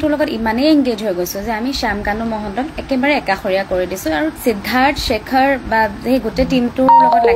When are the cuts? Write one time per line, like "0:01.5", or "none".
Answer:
0:04.4